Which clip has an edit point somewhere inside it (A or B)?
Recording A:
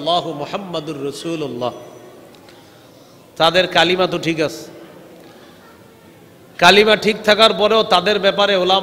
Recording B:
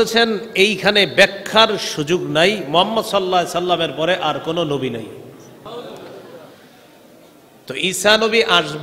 B